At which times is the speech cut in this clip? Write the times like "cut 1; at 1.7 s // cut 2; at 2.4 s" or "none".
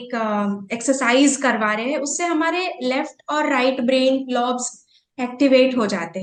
none